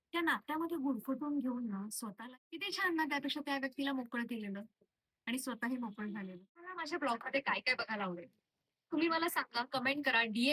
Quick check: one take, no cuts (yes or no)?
no